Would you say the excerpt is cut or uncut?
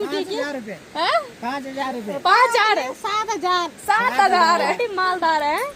cut